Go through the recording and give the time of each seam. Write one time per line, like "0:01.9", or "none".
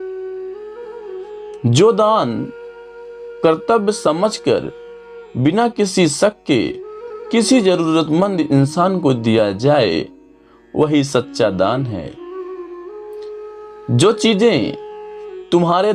0:00.9